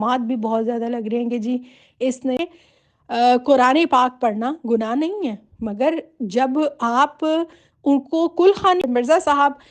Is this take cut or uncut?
cut